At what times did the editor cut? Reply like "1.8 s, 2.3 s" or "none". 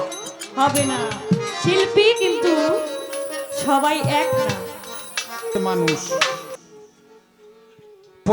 6.5 s